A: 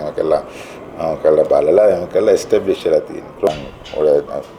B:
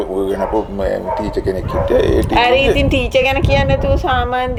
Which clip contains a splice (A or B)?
A